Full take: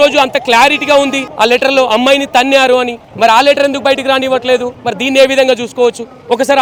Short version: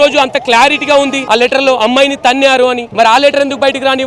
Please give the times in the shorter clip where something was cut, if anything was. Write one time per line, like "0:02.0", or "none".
0:01.2
0:02.8